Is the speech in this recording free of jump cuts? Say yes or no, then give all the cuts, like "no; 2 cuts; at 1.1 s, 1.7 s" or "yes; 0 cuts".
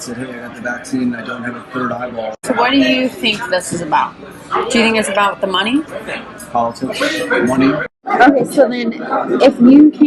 no; 3 cuts; at 2.4 s, 6.0 s, 8.0 s